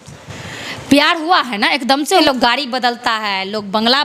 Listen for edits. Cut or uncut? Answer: cut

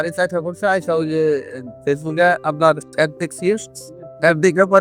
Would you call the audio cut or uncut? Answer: uncut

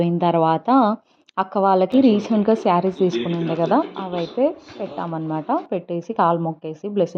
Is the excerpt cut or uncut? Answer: uncut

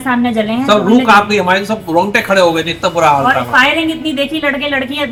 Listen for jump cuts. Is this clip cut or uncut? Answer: uncut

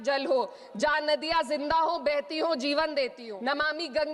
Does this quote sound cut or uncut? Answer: cut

